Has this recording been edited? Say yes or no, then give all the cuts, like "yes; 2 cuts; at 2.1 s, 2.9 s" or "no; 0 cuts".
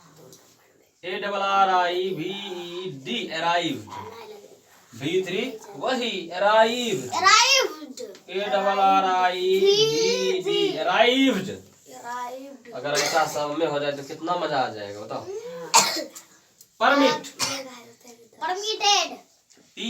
no; 0 cuts